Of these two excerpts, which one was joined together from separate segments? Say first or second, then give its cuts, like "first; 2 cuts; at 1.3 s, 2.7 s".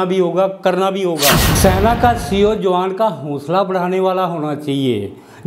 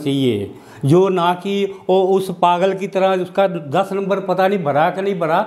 first; 1 cut; at 1.5 s